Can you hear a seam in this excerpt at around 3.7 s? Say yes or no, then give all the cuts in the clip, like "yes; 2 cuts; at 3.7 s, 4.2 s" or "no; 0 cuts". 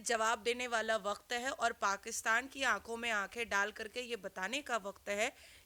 no; 0 cuts